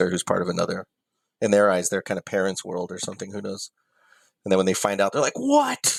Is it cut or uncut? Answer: uncut